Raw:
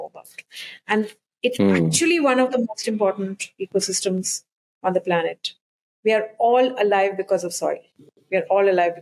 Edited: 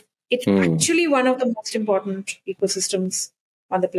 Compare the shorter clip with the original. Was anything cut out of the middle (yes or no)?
no